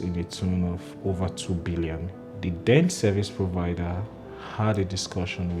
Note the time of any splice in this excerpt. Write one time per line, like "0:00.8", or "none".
0:02.2